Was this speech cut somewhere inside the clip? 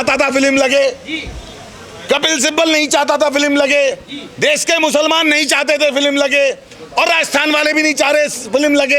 no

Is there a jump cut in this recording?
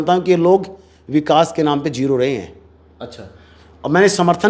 no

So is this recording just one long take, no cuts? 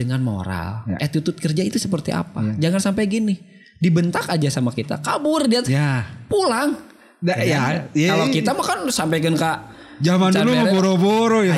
no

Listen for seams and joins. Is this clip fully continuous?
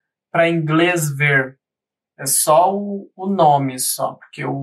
yes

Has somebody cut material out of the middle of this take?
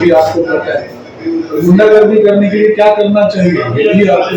no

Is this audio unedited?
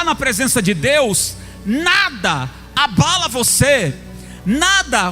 yes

